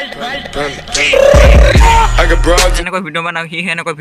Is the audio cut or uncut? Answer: cut